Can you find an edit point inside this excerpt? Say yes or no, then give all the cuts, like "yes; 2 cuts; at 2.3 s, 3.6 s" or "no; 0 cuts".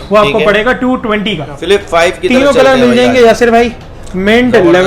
yes; 1 cut; at 1.5 s